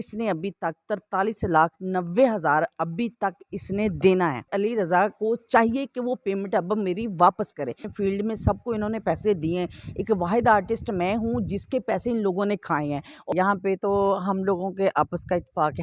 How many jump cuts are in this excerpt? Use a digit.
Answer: 3